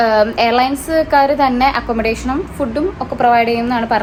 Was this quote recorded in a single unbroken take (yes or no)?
yes